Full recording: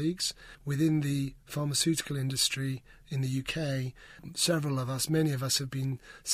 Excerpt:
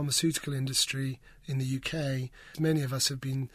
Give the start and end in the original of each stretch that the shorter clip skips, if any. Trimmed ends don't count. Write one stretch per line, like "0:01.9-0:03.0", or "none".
0:04.1-0:05.0